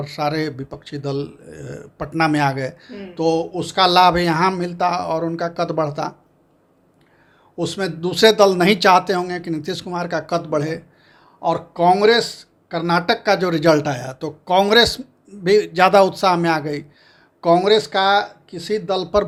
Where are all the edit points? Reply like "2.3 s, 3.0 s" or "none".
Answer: none